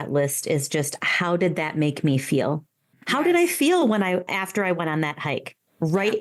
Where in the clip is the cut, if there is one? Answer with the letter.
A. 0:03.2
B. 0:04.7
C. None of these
C